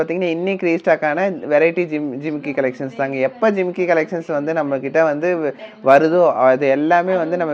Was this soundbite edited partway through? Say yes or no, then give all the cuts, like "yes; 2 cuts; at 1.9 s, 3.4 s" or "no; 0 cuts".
no; 0 cuts